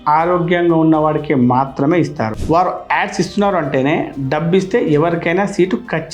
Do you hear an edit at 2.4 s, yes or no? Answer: yes